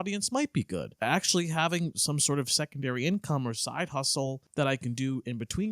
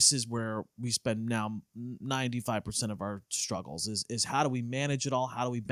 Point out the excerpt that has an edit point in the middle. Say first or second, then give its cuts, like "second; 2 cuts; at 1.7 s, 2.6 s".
first; 2 cuts; at 1.0 s, 4.4 s